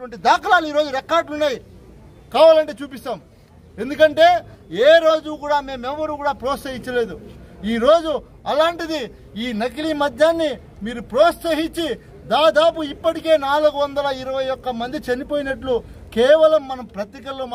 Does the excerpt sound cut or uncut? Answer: uncut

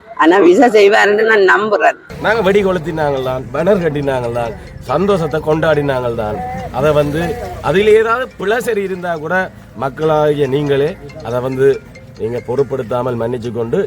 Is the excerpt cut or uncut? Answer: cut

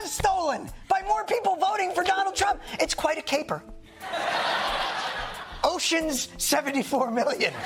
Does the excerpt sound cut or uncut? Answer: uncut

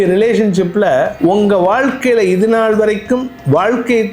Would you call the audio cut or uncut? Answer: cut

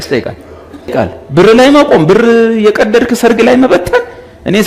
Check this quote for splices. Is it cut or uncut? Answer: cut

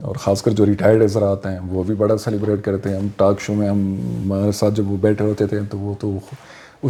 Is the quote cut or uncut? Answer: uncut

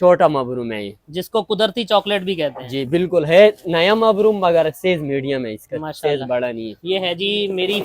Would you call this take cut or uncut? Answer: cut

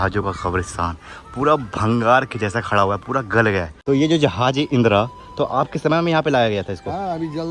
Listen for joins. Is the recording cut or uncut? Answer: cut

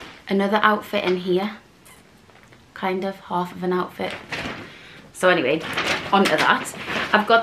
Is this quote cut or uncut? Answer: uncut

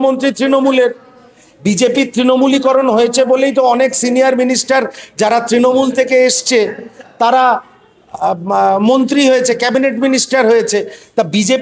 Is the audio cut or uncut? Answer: uncut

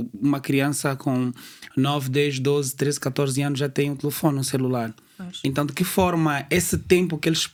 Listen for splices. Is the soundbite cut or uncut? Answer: uncut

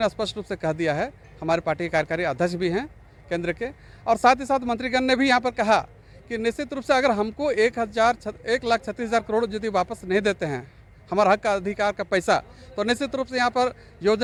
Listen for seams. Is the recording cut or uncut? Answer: uncut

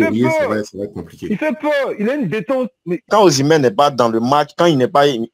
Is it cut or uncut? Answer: cut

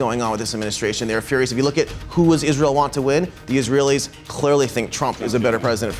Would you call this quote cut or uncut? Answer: uncut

